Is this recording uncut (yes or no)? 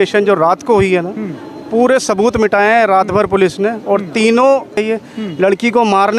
no